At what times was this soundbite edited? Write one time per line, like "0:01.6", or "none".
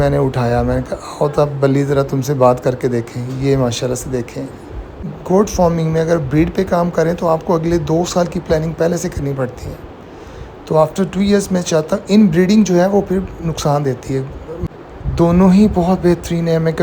0:05.2
0:14.6